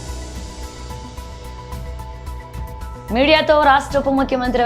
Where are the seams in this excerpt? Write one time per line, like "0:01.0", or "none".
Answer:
none